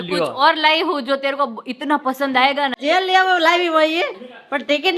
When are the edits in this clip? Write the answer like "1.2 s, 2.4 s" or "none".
2.8 s